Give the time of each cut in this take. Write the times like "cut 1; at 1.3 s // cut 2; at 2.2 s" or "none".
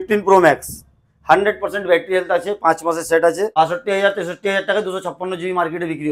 cut 1; at 3.5 s